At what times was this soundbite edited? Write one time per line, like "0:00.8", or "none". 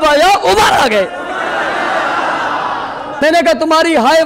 0:03.2